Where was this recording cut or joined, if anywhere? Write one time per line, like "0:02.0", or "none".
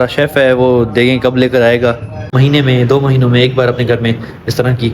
0:02.2